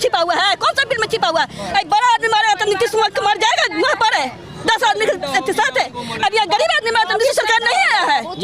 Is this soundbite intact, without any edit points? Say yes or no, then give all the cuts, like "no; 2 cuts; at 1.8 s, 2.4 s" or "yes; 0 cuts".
yes; 0 cuts